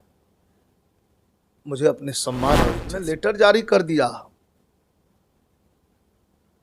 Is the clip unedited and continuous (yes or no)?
no